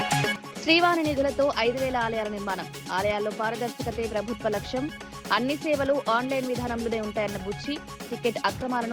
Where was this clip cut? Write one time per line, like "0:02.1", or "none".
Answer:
none